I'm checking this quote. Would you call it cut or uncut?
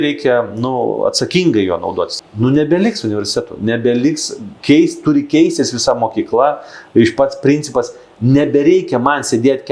cut